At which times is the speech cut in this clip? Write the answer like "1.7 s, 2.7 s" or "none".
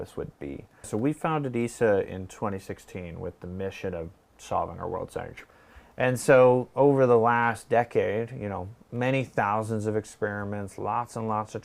0.9 s, 5.4 s